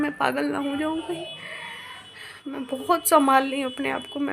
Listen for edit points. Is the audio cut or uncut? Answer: uncut